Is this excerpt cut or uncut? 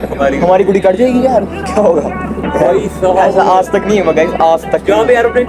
uncut